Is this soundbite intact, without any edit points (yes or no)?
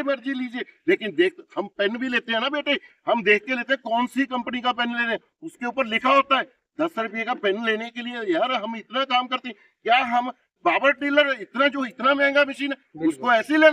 yes